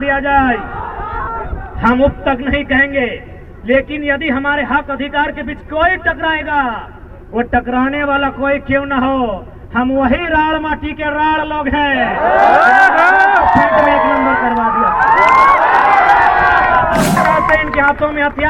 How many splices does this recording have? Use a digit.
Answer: 1